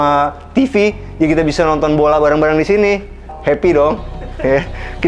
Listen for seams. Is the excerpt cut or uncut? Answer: cut